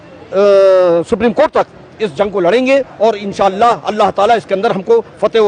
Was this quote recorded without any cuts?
yes; 0 cuts

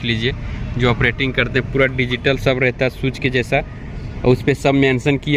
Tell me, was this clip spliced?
no; 0 cuts

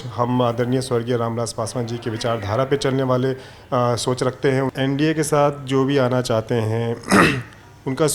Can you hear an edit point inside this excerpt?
yes; 1 cut; at 4.7 s

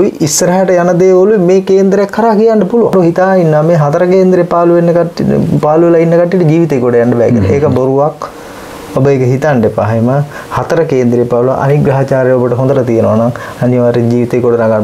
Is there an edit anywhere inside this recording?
yes; 1 cut; at 2.9 s

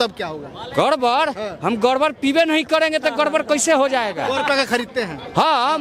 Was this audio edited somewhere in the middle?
no; 0 cuts

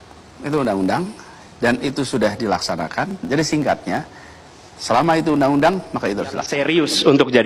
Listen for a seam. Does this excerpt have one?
yes; 1 cut; at 6.5 s

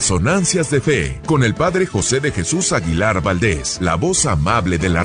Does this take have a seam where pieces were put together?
yes; 2 cuts; at 1.1 s, 3.7 s

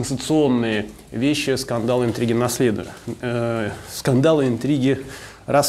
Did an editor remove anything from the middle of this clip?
no; 0 cuts

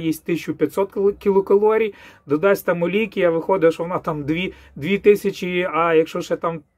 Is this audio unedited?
yes; 0 cuts

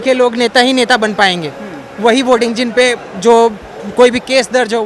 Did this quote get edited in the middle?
no; 0 cuts

